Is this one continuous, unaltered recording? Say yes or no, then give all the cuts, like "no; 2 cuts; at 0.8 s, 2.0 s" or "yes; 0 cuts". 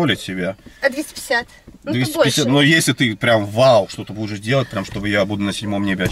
yes; 0 cuts